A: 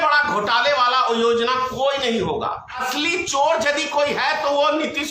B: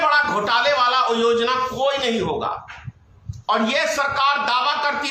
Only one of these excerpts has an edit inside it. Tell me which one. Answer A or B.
A